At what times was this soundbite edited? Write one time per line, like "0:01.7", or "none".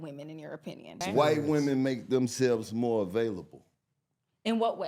0:01.0